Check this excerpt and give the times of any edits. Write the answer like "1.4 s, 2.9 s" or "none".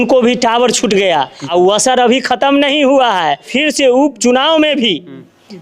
1.4 s, 3.5 s